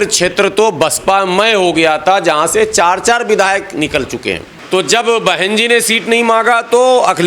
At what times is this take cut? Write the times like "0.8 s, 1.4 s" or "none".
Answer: 4.5 s